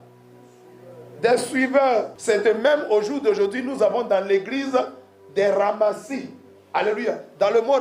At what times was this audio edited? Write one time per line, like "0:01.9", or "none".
0:02.1